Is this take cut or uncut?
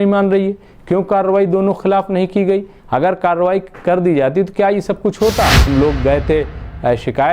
cut